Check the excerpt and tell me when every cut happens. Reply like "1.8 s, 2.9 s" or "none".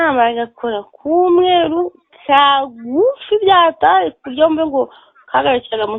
none